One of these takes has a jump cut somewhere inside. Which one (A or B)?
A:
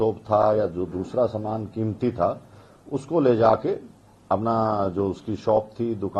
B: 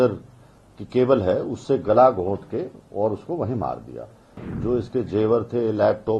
B